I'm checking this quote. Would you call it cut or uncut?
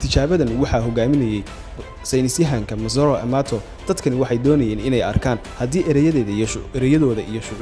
uncut